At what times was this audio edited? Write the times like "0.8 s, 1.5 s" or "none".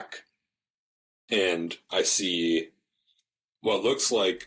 1.8 s